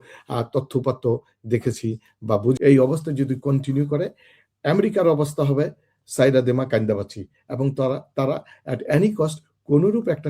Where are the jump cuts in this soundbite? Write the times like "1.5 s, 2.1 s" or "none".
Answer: 2.6 s